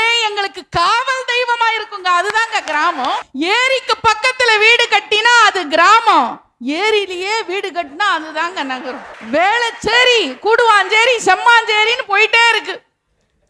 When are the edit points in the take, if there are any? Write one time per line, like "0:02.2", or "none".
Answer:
0:03.3
0:09.1

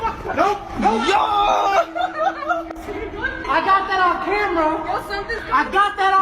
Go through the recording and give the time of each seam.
0:03.4

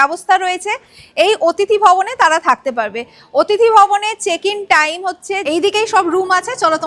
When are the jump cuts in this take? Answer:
0:05.4

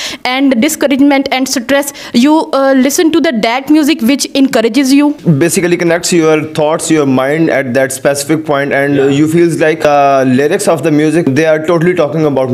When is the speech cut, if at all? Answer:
0:05.2
0:09.8
0:11.3

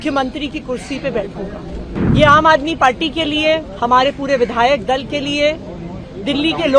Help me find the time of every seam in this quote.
0:01.9

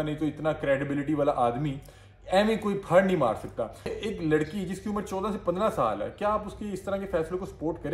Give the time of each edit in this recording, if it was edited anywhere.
0:04.0

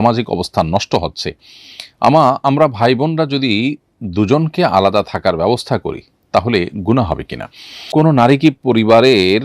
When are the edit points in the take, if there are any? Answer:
0:07.9

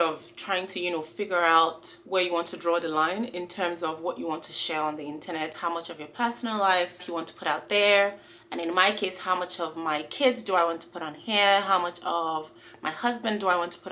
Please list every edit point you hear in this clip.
0:01.9

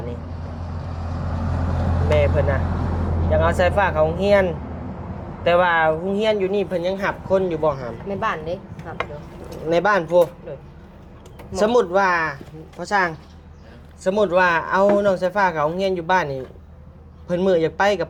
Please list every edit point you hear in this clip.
none

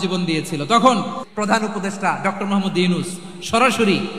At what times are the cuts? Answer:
0:01.2

